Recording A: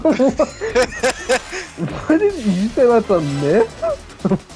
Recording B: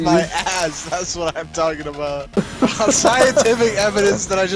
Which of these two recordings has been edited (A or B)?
B